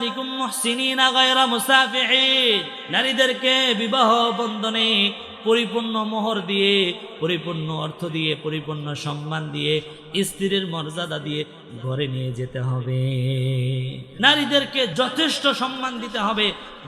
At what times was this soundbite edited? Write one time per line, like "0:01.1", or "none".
0:02.8
0:14.0
0:14.9